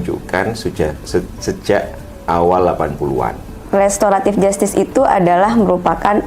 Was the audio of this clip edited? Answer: yes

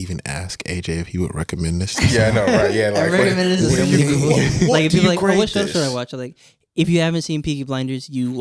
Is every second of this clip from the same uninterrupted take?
yes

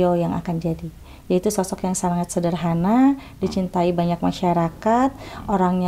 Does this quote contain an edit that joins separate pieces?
no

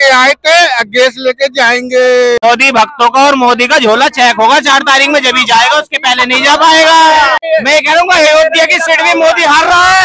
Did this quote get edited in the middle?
yes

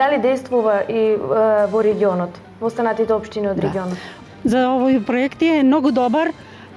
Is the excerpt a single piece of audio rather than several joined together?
no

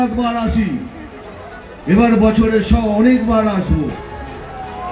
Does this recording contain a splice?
no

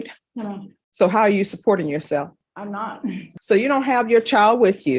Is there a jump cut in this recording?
yes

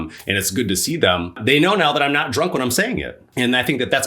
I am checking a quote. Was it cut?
yes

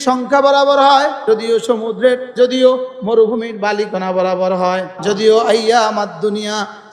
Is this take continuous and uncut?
no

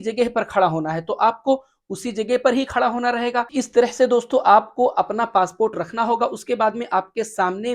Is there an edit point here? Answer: yes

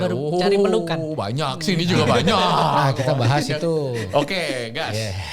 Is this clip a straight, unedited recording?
yes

